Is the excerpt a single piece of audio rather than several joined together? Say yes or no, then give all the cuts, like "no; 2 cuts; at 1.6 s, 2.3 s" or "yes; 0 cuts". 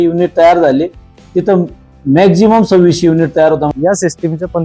no; 1 cut; at 3.7 s